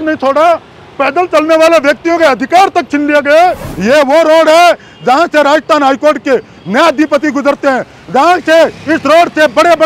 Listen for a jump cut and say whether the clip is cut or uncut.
cut